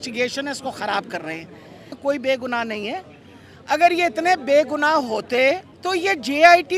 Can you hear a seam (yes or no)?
yes